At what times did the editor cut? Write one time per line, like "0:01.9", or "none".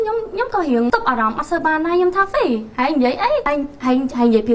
0:00.9
0:03.4